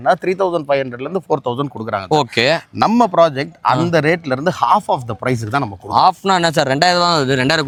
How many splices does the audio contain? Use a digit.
0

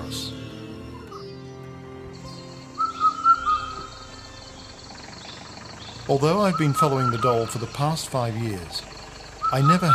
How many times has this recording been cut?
1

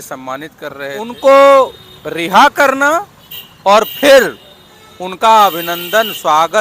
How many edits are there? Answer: 1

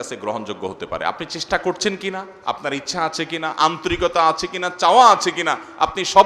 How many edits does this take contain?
0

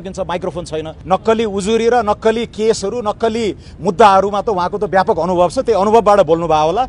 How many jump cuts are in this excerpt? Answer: 1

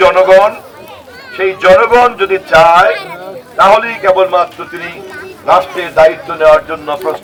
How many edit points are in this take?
0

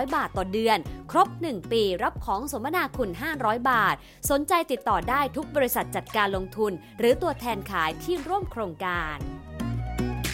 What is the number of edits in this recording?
1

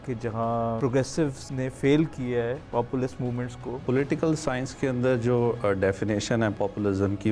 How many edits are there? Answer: 5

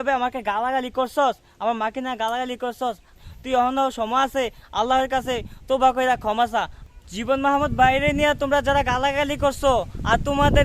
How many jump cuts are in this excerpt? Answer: 2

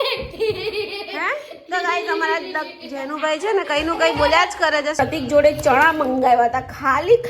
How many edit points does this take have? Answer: 1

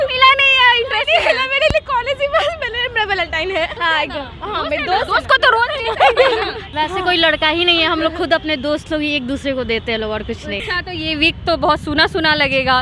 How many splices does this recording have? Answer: 3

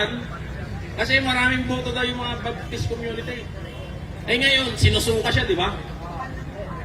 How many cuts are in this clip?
0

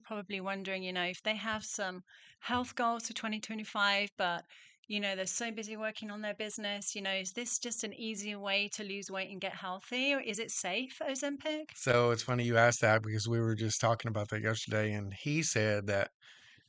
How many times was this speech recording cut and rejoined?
0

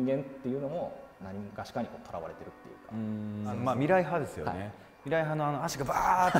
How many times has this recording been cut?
2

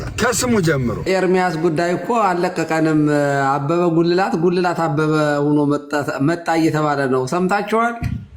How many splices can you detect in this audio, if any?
1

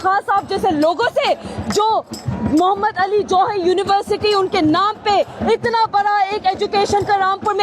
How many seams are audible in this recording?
0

